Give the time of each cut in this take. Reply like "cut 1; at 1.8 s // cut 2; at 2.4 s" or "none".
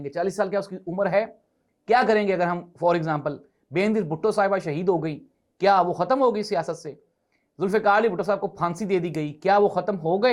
none